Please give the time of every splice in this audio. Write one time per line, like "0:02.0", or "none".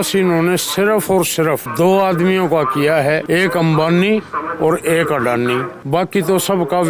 0:01.7
0:03.2
0:05.7